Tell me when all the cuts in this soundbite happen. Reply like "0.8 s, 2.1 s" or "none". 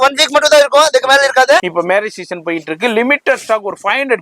1.7 s

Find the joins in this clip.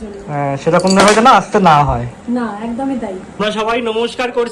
3.4 s

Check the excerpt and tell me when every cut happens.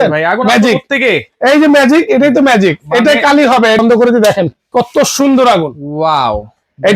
3.8 s

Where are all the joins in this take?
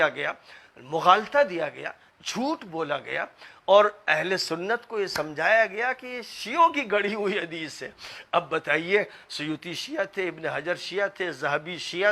none

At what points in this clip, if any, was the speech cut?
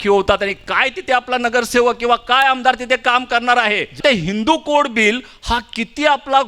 4.0 s

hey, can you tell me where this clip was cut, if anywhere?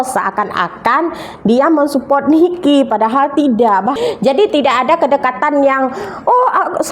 4.0 s

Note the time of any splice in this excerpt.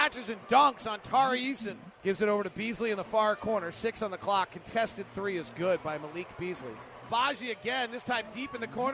1.9 s, 7.0 s

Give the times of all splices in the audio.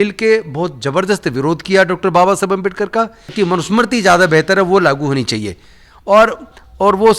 3.3 s

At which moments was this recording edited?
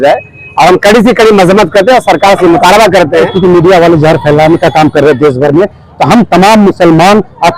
3.3 s

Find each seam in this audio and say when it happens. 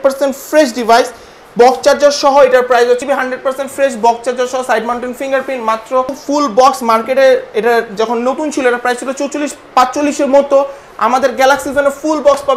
3.0 s, 6.2 s

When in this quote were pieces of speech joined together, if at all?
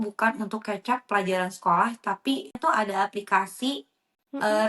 2.6 s

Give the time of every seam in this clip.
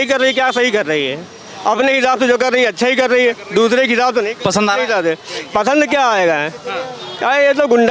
none

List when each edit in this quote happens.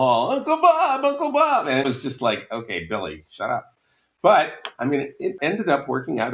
1.8 s, 5.3 s

